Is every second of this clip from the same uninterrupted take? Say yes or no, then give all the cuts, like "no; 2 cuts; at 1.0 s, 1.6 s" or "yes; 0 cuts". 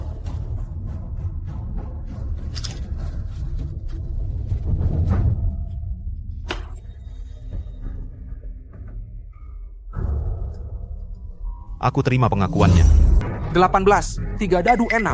no; 1 cut; at 13.2 s